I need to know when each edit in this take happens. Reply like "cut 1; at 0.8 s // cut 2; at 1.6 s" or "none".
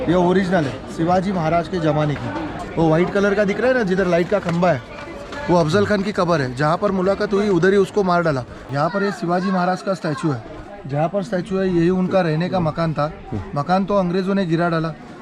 cut 1; at 2.5 s // cut 2; at 8.5 s